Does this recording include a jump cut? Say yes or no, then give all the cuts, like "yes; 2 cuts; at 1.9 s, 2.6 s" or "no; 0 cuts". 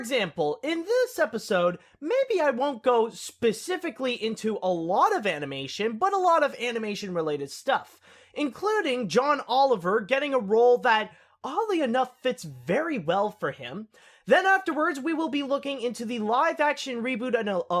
yes; 1 cut; at 5.7 s